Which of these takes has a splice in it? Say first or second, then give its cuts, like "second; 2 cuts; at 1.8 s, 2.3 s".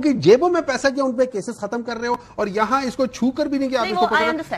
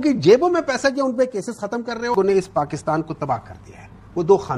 second; 1 cut; at 2.1 s